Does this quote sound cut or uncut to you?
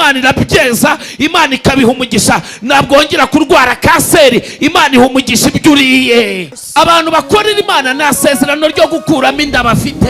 cut